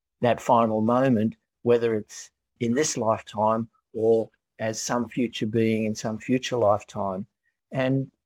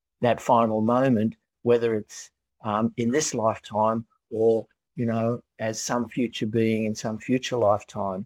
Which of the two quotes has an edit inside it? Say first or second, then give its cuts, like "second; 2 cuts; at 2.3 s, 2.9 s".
first; 2 cuts; at 2.6 s, 4.5 s